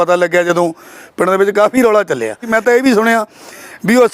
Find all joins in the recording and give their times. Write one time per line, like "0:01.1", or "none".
0:02.5